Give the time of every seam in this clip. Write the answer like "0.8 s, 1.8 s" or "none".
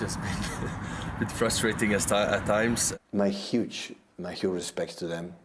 2.8 s